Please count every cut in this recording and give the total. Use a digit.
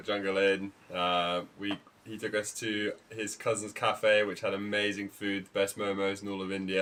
0